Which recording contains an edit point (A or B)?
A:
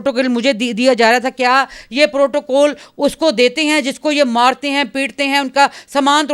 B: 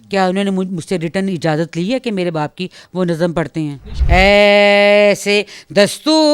B